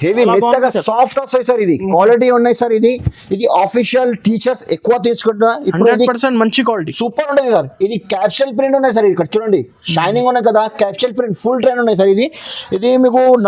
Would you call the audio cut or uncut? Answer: uncut